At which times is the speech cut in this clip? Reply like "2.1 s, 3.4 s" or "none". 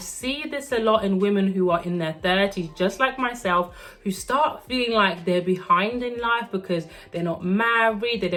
none